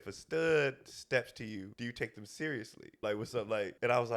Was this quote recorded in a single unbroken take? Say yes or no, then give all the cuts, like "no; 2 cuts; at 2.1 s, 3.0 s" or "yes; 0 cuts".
no; 2 cuts; at 1.7 s, 3.2 s